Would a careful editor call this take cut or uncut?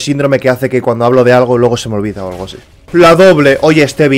cut